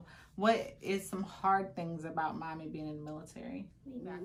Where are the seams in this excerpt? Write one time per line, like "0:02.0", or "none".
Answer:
none